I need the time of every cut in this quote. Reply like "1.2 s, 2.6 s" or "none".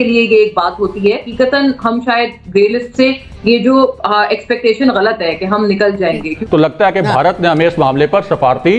1.3 s, 6.3 s